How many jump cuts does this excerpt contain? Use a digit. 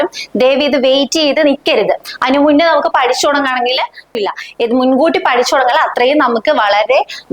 1